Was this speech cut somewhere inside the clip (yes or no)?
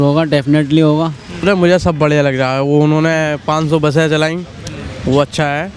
yes